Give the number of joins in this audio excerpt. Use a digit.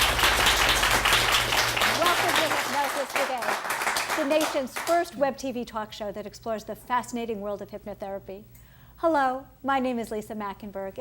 1